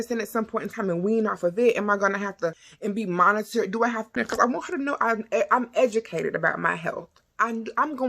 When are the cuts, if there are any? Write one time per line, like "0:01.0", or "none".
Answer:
0:02.7
0:04.1

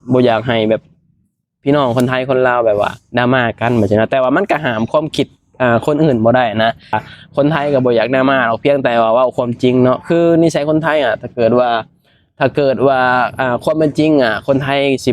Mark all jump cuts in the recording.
0:07.0

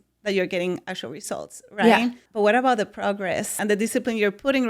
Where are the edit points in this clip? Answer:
0:02.2
0:03.5

